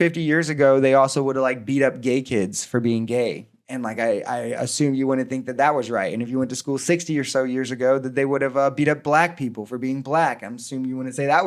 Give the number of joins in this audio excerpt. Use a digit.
0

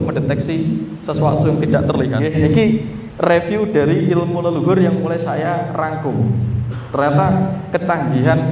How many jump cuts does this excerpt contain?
1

